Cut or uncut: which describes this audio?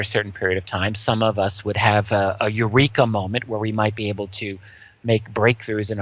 cut